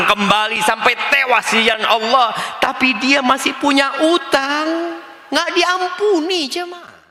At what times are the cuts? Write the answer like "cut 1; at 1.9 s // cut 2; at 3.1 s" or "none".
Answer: none